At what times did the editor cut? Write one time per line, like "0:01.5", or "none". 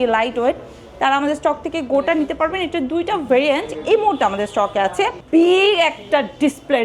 0:05.2